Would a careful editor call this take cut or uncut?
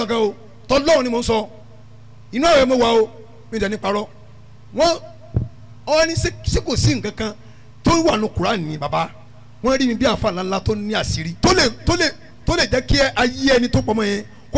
cut